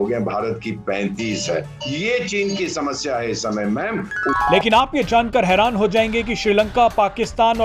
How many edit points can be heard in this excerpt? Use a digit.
1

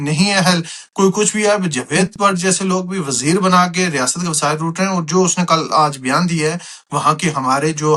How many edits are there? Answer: 0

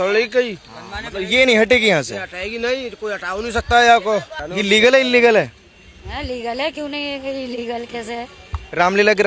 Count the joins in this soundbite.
1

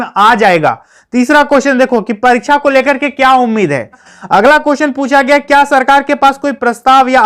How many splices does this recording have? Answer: 2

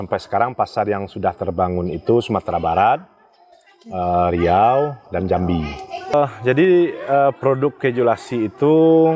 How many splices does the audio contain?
1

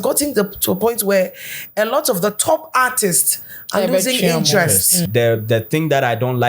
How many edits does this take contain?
1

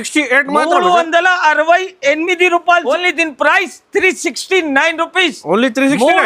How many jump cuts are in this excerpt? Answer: 1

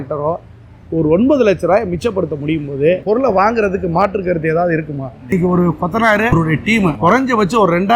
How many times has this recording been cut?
3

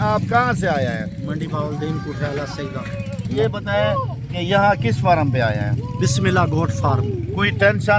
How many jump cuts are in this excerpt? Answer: 1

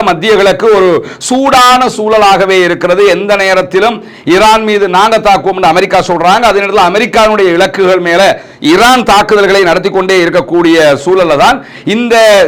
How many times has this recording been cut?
0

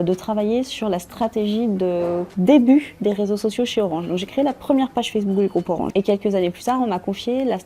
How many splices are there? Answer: 2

